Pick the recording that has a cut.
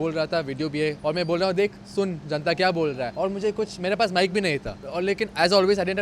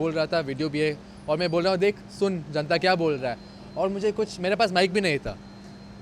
first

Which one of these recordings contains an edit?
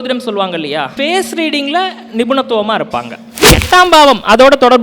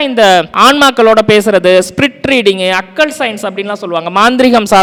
first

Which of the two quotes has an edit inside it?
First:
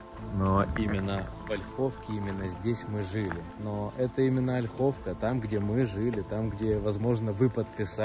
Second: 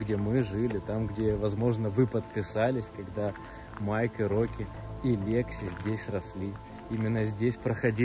first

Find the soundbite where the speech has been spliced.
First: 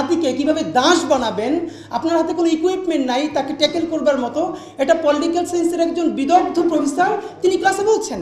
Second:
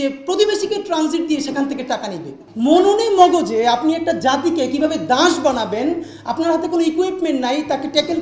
second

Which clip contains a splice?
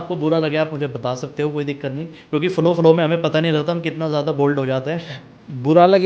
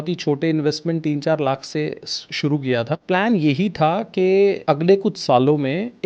second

